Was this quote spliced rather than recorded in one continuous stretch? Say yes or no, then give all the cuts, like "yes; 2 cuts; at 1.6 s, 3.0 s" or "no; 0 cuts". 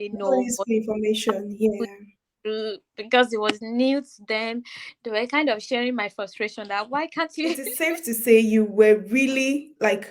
yes; 1 cut; at 7.7 s